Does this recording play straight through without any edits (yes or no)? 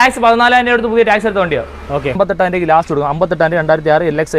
no